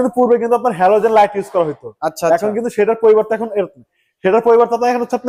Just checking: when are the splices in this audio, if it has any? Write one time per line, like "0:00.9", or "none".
none

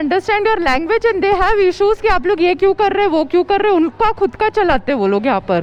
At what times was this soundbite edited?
none

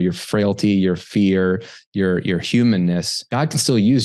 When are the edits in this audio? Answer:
0:03.2

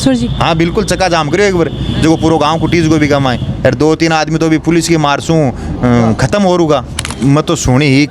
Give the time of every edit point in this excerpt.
0:07.0

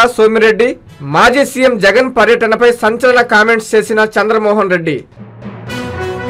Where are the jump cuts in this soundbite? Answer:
0:05.2

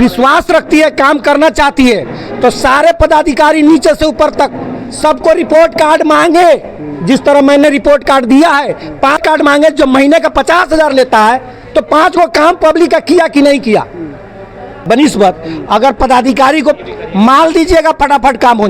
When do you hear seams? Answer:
0:09.2
0:14.8

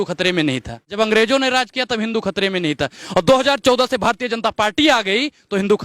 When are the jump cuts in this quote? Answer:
0:00.9

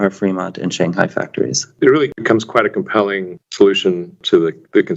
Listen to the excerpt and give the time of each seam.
0:01.7

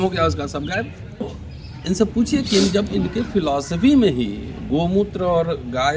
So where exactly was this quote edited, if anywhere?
0:01.2

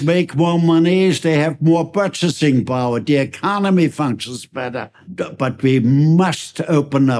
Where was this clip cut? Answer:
0:05.0

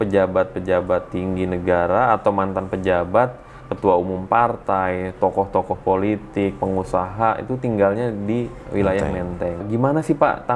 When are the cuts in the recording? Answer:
0:09.6

